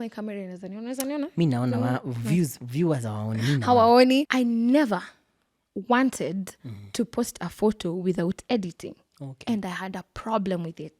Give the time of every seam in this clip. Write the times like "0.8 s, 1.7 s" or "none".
4.3 s